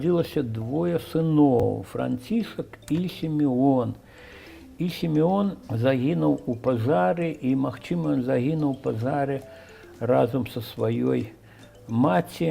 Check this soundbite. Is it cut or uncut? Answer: cut